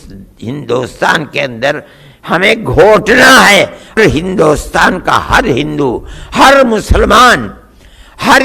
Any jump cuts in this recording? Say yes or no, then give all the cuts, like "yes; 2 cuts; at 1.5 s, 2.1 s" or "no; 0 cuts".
yes; 1 cut; at 4.0 s